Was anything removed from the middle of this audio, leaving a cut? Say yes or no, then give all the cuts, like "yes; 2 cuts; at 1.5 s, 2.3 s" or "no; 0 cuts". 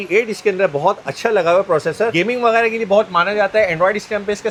no; 0 cuts